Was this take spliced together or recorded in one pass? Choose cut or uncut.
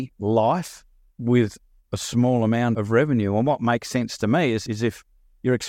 cut